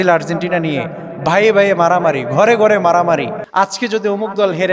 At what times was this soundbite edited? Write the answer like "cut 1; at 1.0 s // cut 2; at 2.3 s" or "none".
cut 1; at 3.4 s